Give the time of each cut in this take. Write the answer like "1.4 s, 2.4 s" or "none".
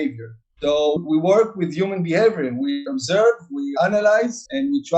2.9 s, 3.7 s